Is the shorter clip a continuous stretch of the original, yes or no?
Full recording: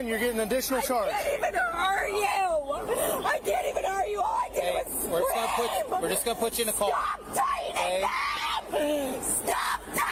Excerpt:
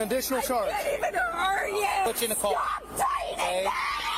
no